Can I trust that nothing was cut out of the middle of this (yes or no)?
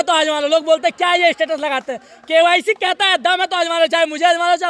yes